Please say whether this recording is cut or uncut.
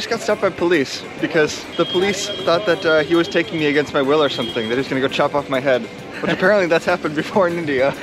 cut